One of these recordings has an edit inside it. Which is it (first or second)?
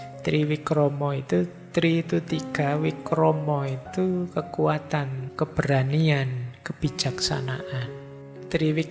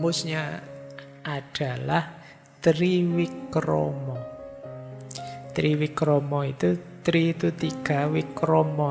first